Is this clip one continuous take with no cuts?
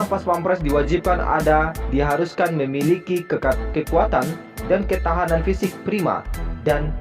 yes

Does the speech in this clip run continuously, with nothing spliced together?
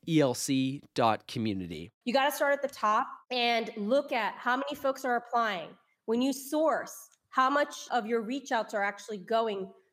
no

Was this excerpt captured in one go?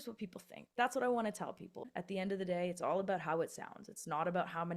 no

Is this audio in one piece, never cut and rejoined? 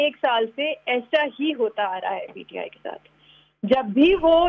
yes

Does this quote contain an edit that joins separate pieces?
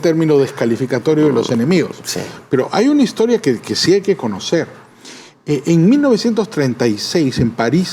no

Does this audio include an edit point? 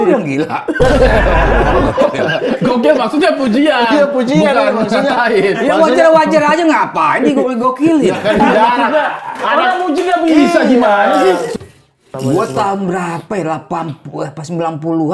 yes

